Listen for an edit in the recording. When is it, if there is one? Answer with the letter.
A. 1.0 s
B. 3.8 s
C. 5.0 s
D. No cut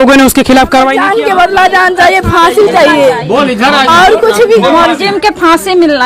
A